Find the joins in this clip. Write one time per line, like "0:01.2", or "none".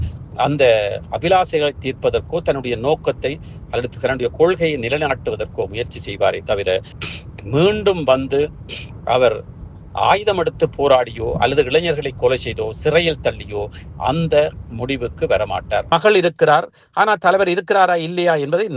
0:15.9

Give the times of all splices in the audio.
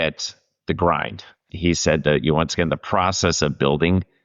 0:01.4

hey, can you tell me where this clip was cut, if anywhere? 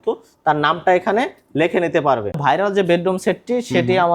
0:02.4

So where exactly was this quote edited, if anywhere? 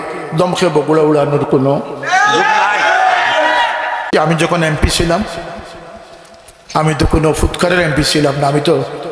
0:04.1

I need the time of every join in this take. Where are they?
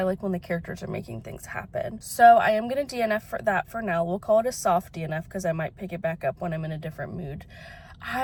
none

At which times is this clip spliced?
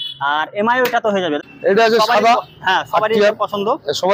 0:01.4

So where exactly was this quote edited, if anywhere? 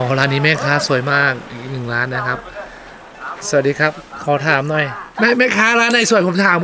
0:05.1

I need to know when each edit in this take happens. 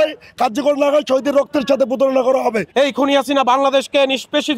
0:02.6

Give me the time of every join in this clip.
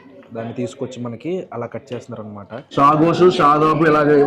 0:02.7

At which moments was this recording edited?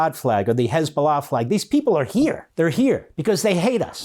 0:02.4
0:03.1

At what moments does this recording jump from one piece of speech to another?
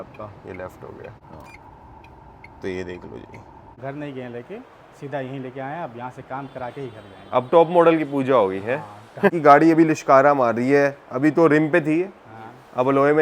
0:01.2
0:03.8
0:09.4

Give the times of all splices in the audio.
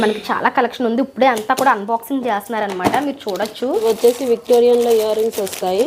0:03.8

